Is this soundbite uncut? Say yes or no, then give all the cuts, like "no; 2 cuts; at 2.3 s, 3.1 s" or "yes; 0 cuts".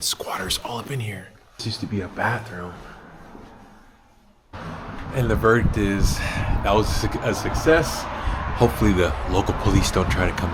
no; 2 cuts; at 1.6 s, 4.5 s